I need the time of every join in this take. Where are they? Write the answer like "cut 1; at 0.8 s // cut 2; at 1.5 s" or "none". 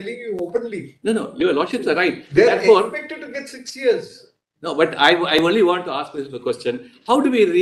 none

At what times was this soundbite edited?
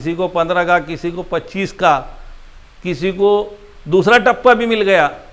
none

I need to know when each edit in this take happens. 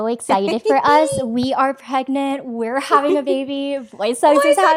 none

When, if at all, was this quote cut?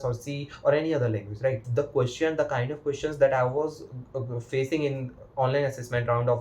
cut 1; at 1.6 s

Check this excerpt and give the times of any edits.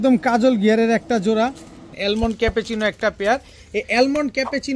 cut 1; at 1.9 s

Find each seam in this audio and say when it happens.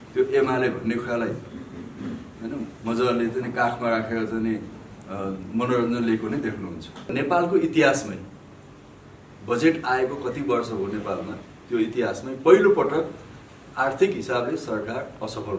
cut 1; at 7.1 s

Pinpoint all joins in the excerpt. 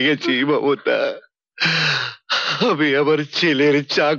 none

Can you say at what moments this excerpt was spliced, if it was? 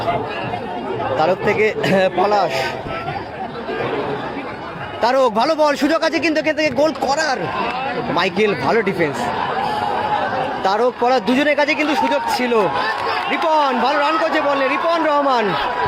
none

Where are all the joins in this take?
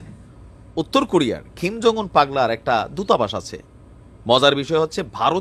none

